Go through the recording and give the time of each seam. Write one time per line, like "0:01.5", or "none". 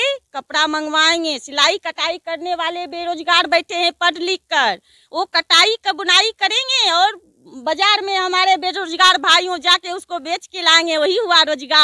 none